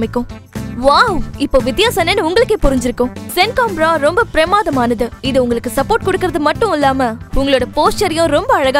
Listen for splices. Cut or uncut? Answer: uncut